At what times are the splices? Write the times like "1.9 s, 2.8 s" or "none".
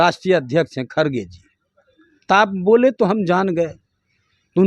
none